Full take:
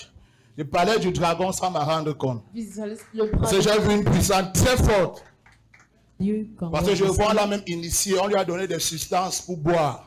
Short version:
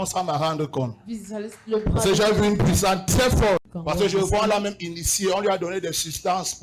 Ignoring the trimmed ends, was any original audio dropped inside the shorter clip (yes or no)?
yes